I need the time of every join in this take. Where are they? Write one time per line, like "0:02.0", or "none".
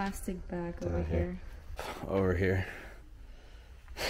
0:01.7